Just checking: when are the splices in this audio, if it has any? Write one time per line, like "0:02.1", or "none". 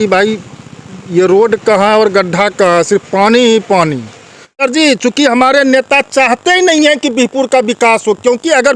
0:04.6